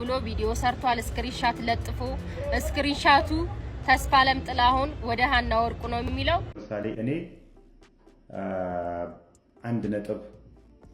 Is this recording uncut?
no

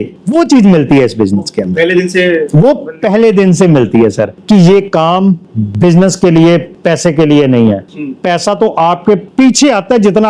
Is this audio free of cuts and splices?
no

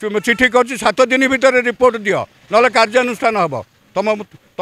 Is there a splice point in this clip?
no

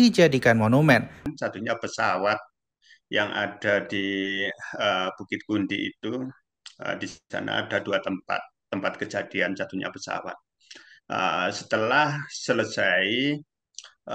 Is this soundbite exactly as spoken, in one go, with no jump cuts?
no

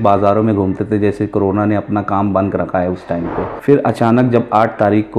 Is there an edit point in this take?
yes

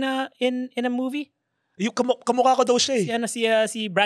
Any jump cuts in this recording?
no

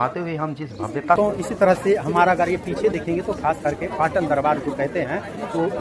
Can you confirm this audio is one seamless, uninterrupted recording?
no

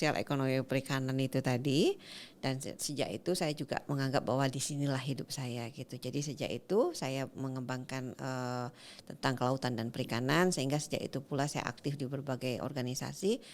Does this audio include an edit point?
no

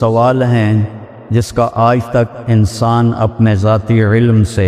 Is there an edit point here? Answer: no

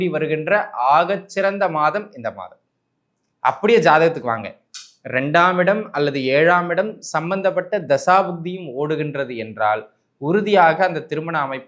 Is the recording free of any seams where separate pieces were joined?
yes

